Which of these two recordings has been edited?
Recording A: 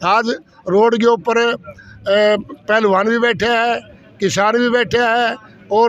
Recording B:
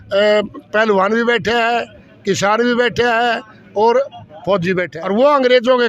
B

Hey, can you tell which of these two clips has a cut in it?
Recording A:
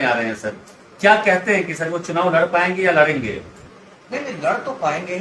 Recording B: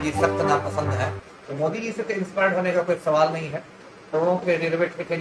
B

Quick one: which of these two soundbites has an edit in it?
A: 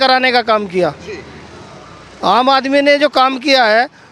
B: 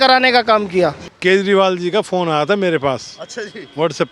B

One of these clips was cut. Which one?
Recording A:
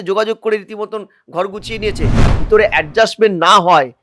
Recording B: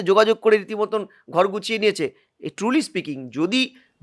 A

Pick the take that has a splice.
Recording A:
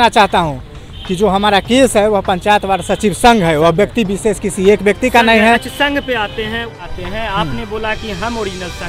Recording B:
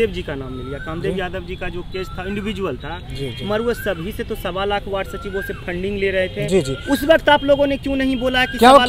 A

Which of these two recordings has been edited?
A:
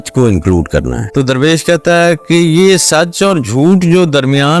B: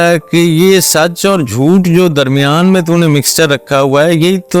A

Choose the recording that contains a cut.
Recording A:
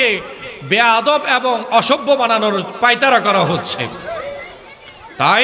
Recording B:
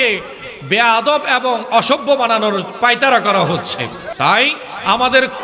B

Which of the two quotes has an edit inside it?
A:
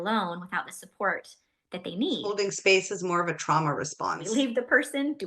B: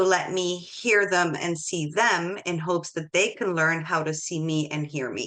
A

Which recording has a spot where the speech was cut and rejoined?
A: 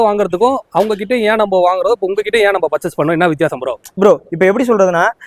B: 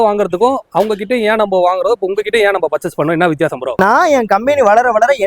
B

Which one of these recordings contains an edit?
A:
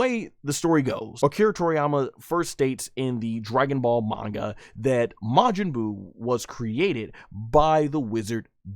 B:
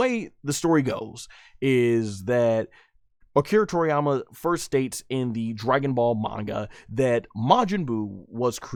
A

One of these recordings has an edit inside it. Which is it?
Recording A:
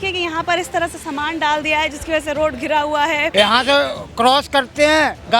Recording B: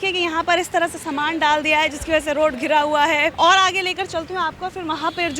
A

